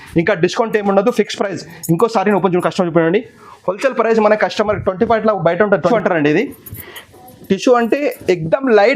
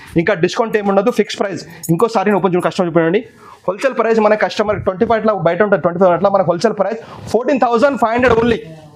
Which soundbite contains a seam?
first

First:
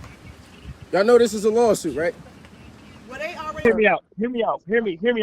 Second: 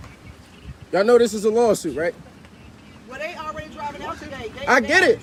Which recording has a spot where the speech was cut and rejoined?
first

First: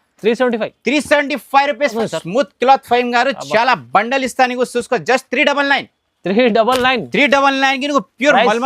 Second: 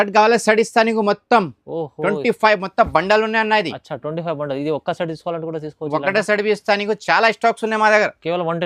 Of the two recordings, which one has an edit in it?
first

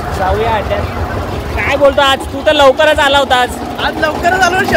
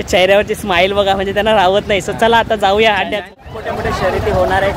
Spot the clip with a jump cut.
second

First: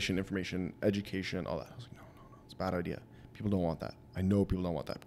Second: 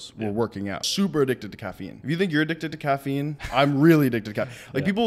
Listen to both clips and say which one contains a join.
second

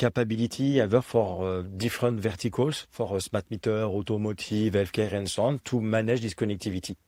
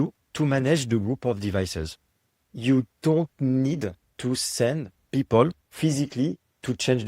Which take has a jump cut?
second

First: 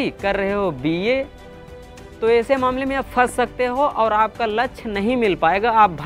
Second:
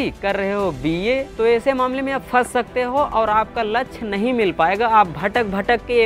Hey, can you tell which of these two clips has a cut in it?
second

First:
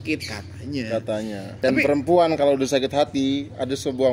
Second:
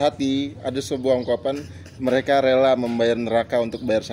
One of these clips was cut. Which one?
first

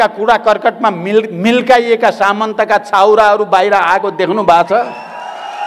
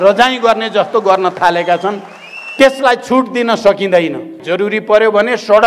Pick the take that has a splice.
second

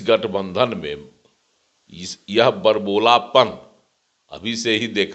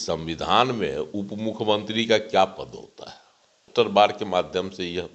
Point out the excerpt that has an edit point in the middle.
second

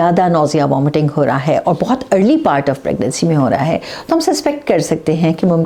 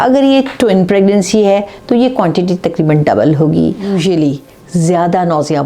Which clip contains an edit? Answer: second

